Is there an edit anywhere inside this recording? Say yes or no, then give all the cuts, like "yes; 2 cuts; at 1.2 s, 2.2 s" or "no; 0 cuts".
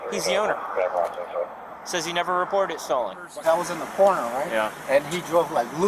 yes; 1 cut; at 3.3 s